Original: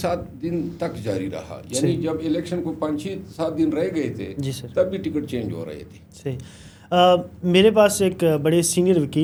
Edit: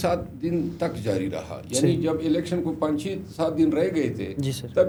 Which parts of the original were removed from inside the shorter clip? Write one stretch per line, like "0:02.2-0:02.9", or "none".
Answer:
none

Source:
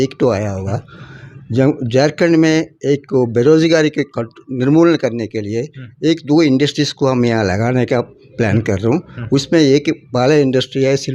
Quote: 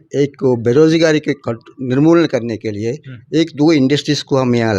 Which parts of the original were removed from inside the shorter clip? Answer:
none

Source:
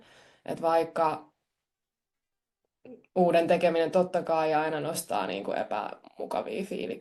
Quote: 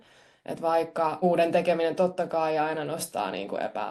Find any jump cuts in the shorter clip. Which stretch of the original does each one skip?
0:01.2-0:03.1

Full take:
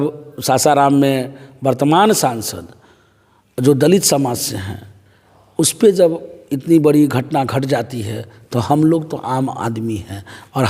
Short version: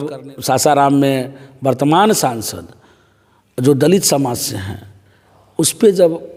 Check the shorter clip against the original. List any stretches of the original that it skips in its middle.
none

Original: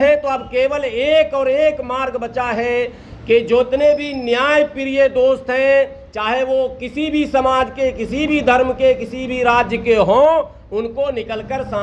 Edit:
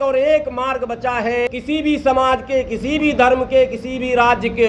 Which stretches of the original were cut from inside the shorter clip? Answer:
0:02.8-0:06.8

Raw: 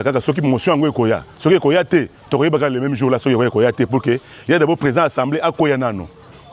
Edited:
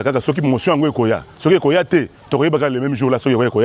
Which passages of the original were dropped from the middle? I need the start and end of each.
none

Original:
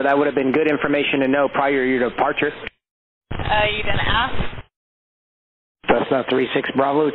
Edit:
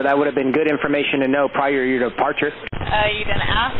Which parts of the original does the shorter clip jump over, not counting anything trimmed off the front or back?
0:02.7-0:03.3

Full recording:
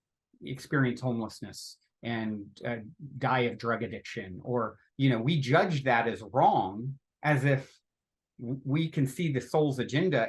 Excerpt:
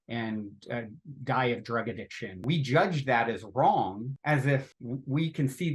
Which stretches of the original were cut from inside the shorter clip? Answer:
0:04.4-0:05.2
0:06.9-0:07.1
0:07.7-0:08.3

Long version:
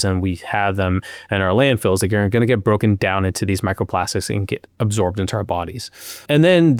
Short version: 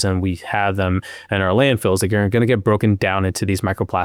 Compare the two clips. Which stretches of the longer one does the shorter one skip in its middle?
none

